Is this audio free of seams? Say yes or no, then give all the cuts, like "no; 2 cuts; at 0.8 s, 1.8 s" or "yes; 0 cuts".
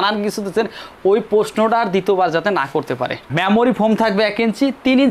no; 1 cut; at 3.3 s